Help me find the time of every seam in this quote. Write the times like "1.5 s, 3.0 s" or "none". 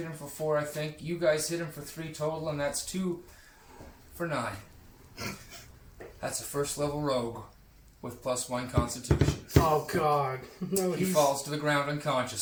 none

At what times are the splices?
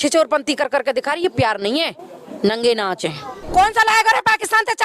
3.4 s

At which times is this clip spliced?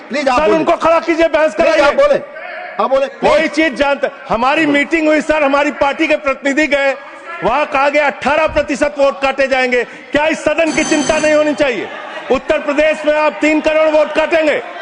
none

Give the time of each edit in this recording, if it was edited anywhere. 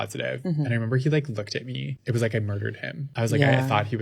1.9 s, 3.1 s

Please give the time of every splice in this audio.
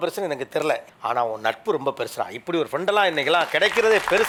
none

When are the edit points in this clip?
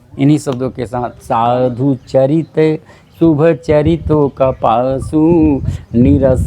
1.1 s

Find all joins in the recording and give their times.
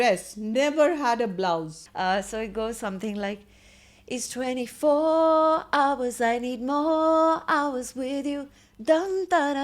1.8 s

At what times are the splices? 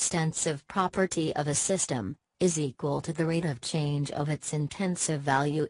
1.1 s

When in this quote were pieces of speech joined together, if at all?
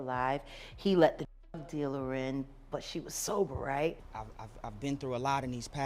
4.1 s

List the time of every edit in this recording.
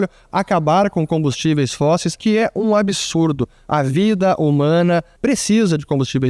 2.2 s, 5.1 s

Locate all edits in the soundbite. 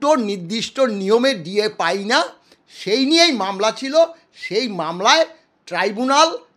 none

